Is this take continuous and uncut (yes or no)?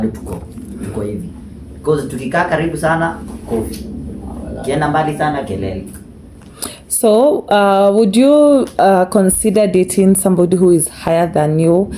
yes